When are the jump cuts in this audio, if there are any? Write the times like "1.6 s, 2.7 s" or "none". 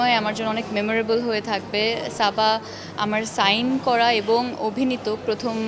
none